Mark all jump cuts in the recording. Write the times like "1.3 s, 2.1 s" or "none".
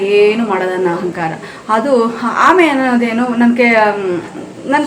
none